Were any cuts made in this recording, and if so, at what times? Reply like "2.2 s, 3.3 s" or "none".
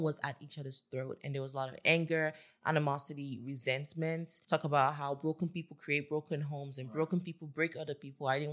4.3 s